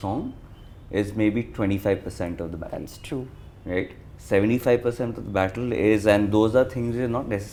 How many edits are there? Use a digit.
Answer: 0